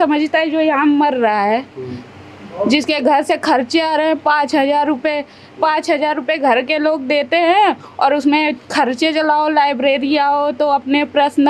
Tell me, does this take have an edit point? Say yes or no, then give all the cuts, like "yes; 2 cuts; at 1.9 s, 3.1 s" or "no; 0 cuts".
no; 0 cuts